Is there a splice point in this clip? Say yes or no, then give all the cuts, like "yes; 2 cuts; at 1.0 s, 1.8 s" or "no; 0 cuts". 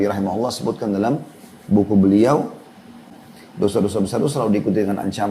yes; 1 cut; at 3.0 s